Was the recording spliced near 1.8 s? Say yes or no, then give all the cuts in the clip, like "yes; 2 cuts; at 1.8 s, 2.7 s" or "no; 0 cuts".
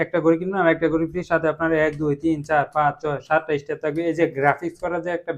no; 0 cuts